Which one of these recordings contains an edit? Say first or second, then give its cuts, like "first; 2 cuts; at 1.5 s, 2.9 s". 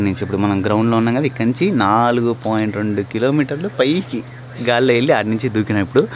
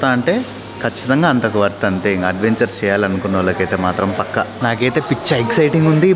second; 1 cut; at 4.5 s